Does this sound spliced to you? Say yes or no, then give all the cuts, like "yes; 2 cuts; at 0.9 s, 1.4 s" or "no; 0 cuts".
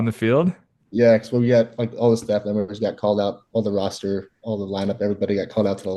no; 0 cuts